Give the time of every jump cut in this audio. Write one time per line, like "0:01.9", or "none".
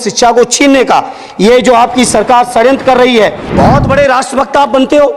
0:03.4